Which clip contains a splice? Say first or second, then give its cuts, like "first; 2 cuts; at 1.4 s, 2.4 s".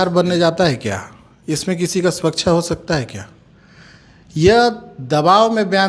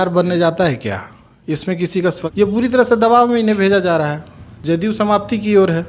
second; 1 cut; at 2.2 s